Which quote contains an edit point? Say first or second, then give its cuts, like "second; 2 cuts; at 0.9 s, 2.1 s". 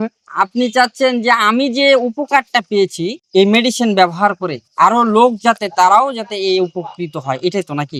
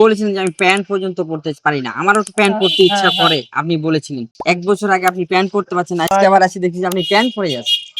second; 2 cuts; at 4.3 s, 6.1 s